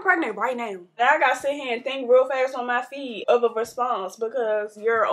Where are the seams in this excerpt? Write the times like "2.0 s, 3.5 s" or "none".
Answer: 1.0 s, 3.2 s